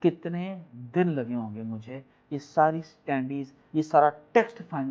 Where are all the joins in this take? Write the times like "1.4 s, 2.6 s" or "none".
none